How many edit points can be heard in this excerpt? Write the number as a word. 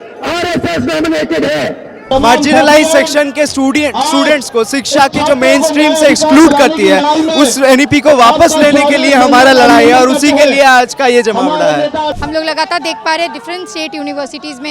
two